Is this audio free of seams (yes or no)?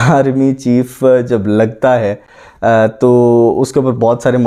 yes